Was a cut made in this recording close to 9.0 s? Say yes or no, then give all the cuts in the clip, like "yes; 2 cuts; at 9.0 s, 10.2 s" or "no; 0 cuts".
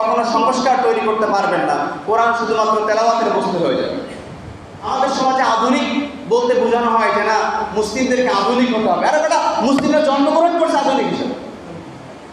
no; 1 cut; at 4.8 s